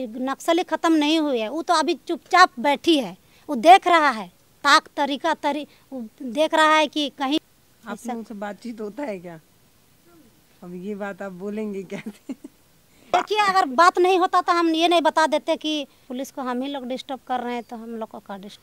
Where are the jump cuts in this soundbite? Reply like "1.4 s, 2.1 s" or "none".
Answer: none